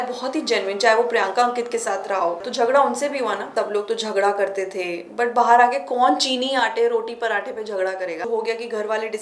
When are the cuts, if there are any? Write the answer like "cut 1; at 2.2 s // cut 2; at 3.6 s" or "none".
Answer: cut 1; at 2.4 s // cut 2; at 3.5 s // cut 3; at 8.3 s